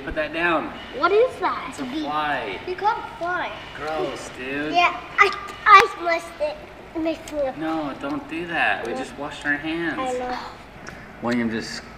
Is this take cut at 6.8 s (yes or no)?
no